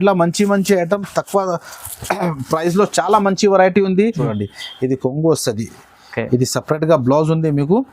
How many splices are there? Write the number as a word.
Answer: one